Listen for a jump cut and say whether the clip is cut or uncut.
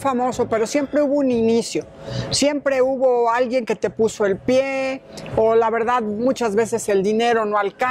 uncut